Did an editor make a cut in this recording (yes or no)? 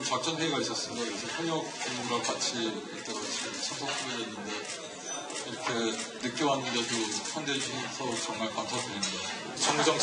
yes